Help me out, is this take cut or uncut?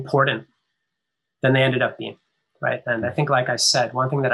uncut